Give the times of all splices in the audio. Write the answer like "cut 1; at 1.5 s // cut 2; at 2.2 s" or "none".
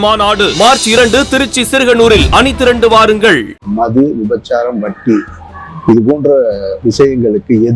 cut 1; at 3.6 s